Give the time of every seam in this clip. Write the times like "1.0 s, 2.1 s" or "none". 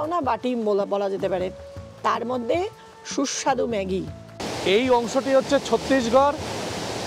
4.4 s

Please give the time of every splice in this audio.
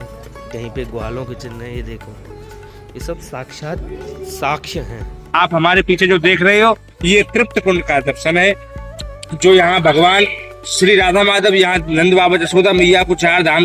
5.2 s

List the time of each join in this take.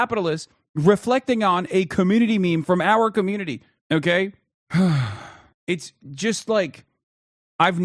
none

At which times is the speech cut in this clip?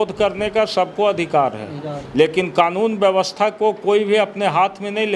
none

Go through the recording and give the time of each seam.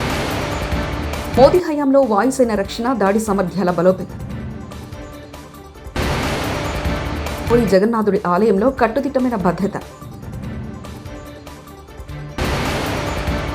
1.3 s

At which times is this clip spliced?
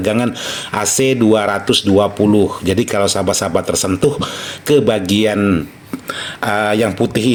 none

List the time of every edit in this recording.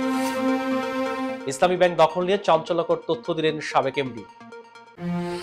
1.2 s

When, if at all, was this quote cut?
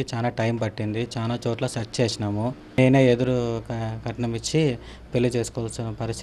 2.8 s

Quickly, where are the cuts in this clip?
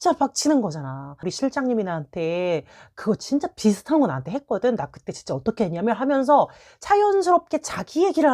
1.3 s

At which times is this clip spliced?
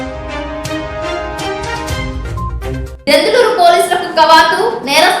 2.5 s

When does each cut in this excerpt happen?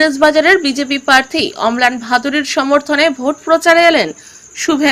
none

